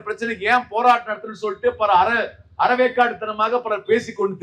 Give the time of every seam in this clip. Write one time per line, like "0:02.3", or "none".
none